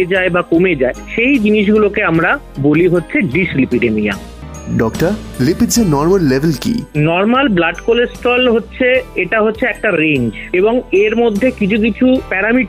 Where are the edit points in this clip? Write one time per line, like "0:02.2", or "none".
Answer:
0:04.4